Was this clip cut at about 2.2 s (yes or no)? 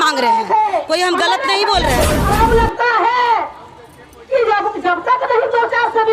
yes